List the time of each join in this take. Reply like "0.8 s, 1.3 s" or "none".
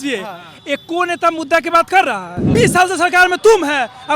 2.3 s